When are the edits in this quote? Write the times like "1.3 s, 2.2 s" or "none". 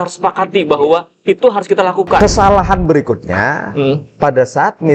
2.2 s